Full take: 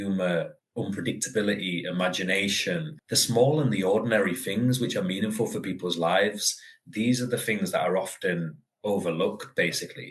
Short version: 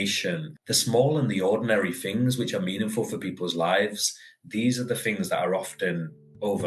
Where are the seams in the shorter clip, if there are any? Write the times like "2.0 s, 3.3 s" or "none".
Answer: none